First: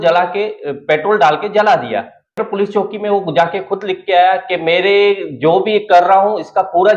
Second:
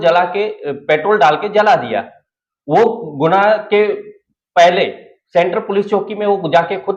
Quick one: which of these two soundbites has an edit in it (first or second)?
first